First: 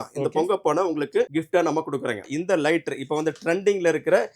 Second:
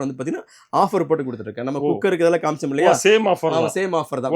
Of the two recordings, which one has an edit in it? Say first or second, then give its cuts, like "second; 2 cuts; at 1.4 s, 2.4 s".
first; 2 cuts; at 1.3 s, 2.2 s